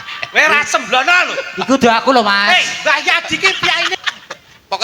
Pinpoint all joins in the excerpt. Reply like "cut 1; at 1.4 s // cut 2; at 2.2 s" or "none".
cut 1; at 3.9 s